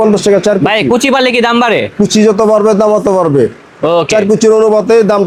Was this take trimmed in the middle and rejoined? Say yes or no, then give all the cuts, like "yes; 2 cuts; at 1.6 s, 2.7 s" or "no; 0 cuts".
no; 0 cuts